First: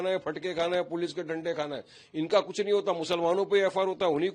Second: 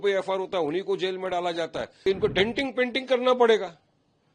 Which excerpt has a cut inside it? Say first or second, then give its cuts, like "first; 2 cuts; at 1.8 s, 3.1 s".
second; 1 cut; at 2.1 s